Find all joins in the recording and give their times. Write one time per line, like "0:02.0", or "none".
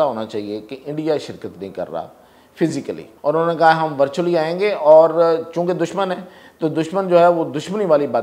0:03.1